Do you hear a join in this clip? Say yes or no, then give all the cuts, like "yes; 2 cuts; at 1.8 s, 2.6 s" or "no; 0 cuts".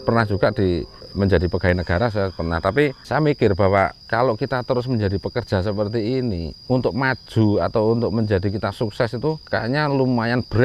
yes; 4 cuts; at 1.0 s, 4.0 s, 6.5 s, 9.4 s